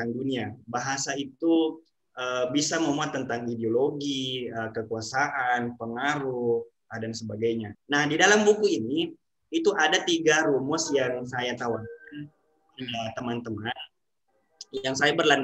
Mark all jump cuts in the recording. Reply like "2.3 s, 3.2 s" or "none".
7.8 s